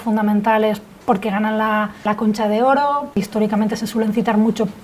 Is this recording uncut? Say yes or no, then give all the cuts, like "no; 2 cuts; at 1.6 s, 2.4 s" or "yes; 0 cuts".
no; 3 cuts; at 0.9 s, 2.1 s, 3.2 s